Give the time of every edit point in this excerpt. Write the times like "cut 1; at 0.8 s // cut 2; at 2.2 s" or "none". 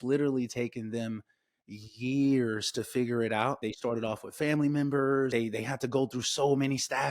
cut 1; at 3.7 s // cut 2; at 5.3 s

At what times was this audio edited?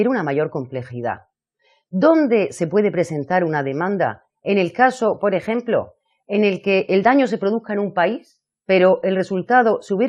none

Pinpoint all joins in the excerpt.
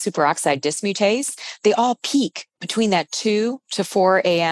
none

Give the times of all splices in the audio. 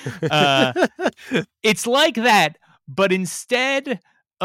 none

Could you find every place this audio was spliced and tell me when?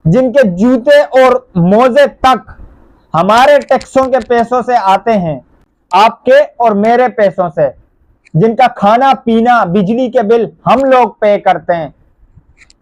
none

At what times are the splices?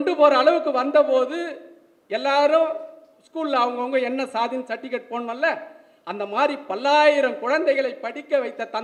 none

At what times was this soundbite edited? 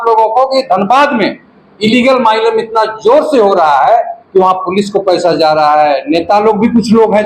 none

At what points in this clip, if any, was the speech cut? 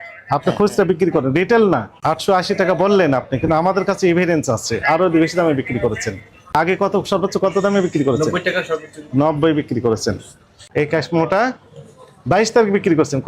cut 1; at 1.9 s // cut 2; at 6.5 s // cut 3; at 10.6 s

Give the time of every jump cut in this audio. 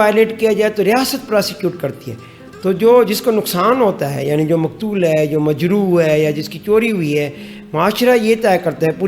none

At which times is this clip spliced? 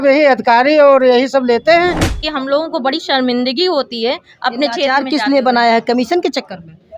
cut 1; at 2.2 s

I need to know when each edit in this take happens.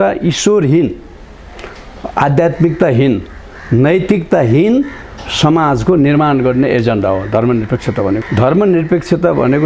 cut 1; at 8.2 s

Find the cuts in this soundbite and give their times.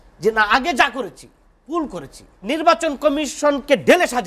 cut 1; at 2.4 s

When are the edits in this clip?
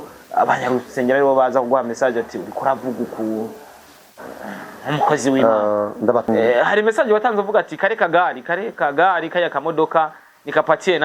cut 1; at 6.3 s

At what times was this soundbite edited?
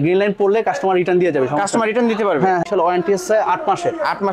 cut 1; at 2.7 s

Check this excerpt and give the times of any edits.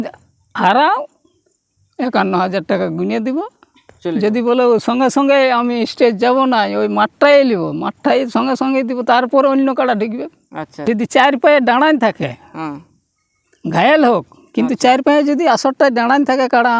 cut 1; at 10.7 s

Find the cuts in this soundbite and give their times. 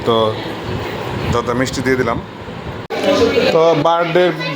cut 1; at 2.9 s

